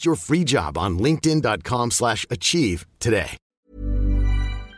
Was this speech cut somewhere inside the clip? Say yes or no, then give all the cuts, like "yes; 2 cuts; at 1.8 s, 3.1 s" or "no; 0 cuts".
yes; 1 cut; at 3.4 s